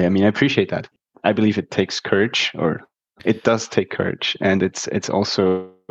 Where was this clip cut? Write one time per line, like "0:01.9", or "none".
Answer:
0:01.0

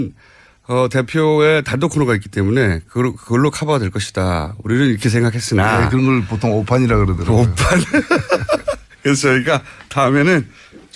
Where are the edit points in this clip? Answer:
0:01.7

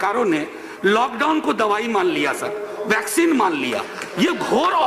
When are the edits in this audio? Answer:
none

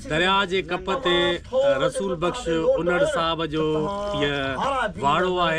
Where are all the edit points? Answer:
none

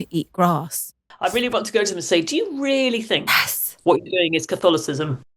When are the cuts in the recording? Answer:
0:01.0

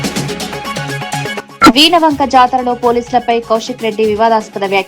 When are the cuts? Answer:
0:01.4

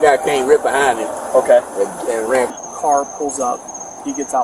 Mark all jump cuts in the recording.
0:02.5

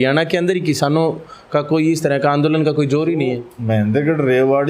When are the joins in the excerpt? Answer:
0:03.5

